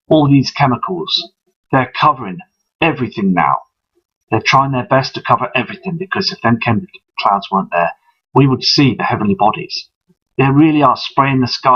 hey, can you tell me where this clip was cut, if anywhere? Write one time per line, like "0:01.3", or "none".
0:03.9